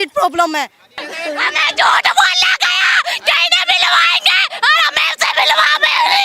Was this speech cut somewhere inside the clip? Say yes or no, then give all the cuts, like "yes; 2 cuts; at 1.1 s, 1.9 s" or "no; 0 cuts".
yes; 1 cut; at 1.1 s